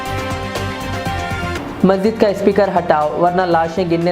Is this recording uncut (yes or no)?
no